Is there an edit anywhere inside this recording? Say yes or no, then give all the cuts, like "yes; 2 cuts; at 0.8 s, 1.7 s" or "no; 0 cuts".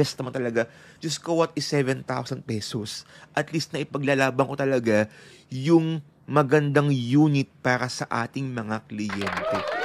no; 0 cuts